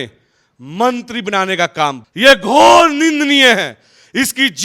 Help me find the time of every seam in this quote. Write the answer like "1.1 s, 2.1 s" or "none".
2.0 s